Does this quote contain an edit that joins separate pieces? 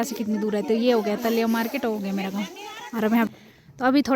yes; 1 cut; at 3.3 s

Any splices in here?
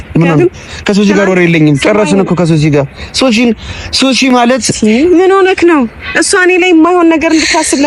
no; 0 cuts

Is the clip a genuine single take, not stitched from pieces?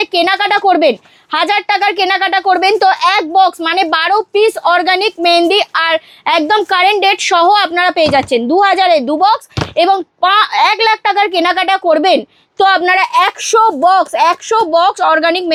yes; 0 cuts

